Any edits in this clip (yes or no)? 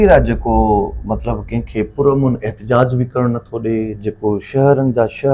no